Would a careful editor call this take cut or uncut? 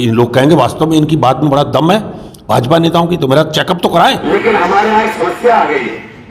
cut